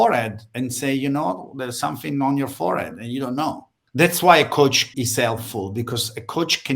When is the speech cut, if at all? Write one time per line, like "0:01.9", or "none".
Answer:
0:03.7
0:04.9